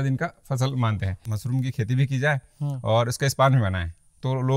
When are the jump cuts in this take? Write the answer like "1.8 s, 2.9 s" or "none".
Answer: 1.2 s